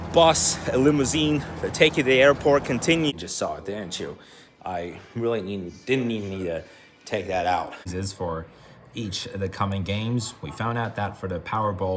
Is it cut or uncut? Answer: cut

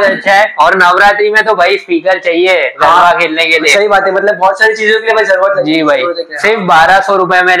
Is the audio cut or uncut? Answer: uncut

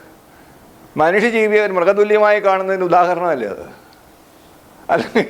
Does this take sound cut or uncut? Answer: uncut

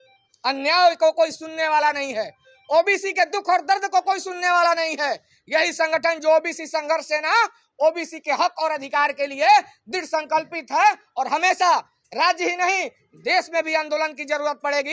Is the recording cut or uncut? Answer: uncut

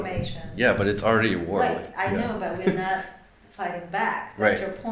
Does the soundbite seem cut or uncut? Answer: uncut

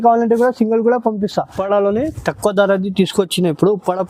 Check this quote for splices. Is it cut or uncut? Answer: cut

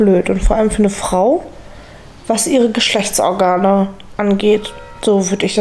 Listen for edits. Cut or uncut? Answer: uncut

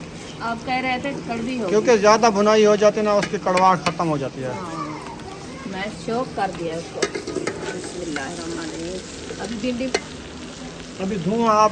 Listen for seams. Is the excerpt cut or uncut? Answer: uncut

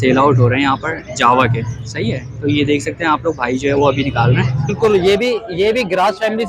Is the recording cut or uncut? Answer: cut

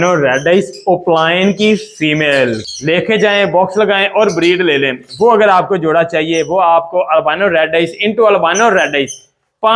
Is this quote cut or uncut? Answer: cut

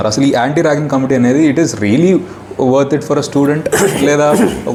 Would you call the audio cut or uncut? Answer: uncut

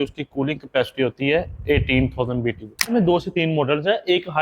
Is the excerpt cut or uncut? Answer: cut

